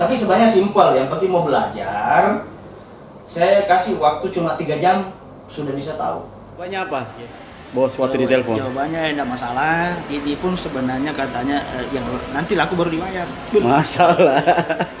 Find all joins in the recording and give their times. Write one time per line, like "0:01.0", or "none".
0:06.7